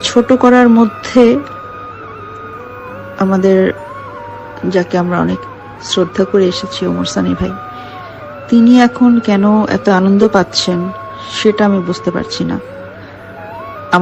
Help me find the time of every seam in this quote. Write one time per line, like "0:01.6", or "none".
none